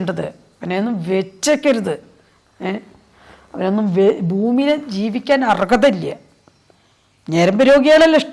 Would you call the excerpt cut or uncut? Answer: uncut